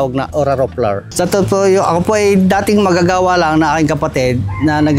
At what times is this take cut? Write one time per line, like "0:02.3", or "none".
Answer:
0:01.1